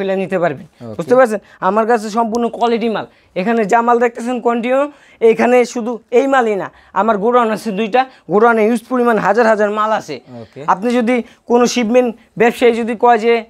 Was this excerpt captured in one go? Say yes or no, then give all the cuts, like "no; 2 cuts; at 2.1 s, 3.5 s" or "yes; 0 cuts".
yes; 0 cuts